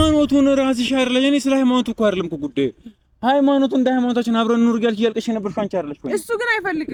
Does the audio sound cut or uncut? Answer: uncut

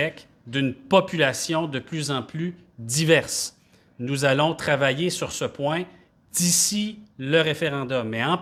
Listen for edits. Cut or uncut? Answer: uncut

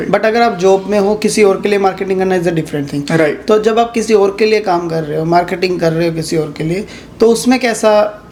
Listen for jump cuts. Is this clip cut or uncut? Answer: uncut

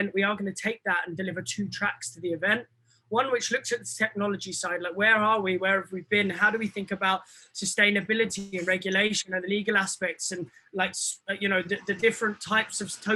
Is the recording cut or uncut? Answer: uncut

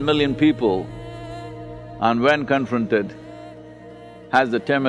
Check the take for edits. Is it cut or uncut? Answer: uncut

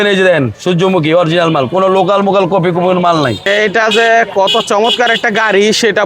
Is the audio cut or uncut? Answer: cut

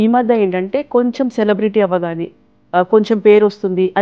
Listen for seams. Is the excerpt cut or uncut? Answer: uncut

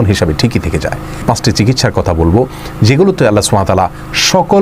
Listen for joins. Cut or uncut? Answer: cut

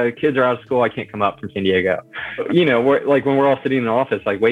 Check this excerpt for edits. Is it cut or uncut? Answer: cut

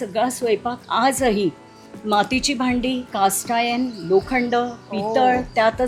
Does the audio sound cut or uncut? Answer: uncut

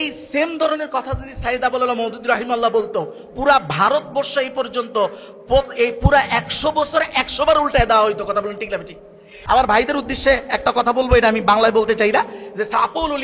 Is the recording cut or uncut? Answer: cut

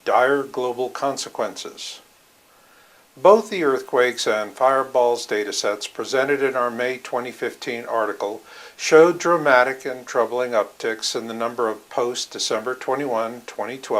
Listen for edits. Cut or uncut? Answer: uncut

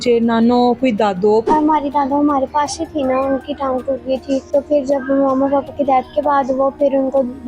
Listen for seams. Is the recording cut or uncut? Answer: cut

